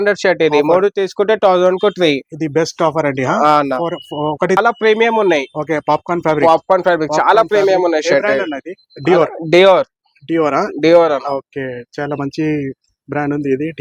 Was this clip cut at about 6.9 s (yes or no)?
no